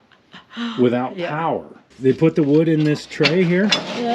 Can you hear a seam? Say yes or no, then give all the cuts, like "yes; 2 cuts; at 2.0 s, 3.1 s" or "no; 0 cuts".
yes; 1 cut; at 1.9 s